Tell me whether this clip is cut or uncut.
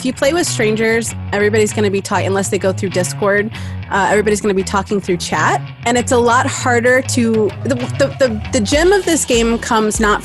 cut